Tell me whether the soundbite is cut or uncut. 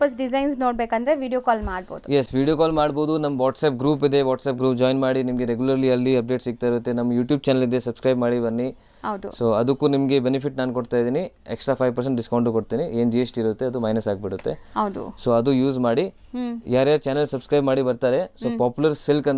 uncut